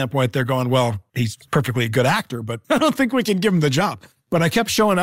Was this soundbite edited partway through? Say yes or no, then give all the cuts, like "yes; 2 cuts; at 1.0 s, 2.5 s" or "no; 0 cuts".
no; 0 cuts